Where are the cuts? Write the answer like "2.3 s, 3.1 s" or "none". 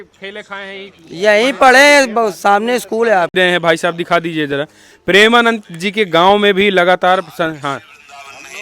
3.3 s

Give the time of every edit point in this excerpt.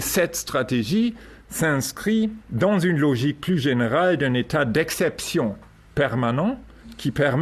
none

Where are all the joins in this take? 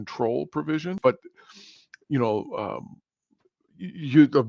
1.0 s

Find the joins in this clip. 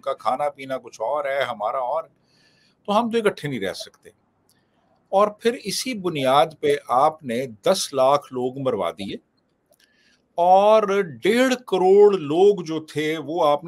none

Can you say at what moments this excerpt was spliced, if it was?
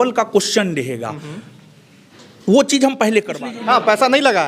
3.4 s

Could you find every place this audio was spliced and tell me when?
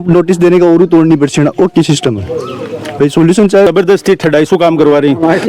3.7 s

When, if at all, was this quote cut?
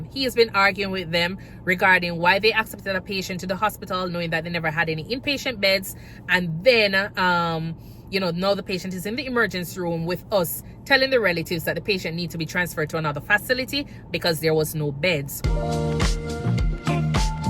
15.4 s

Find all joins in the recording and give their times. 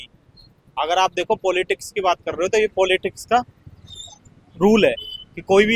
none

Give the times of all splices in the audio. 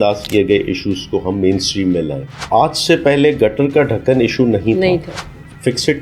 2.3 s

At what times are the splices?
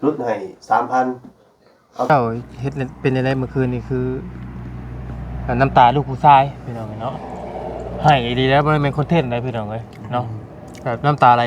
2.1 s

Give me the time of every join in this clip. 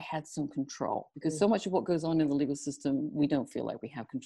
1.1 s

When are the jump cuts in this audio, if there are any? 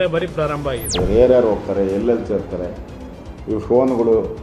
1.0 s

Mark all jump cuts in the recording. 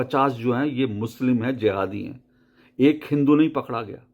none

